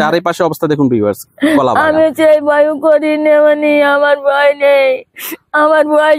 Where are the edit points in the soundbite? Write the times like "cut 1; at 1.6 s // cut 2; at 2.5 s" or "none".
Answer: none